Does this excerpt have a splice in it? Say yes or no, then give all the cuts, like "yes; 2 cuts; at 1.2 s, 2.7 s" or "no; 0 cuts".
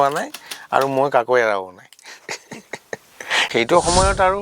yes; 1 cut; at 3.5 s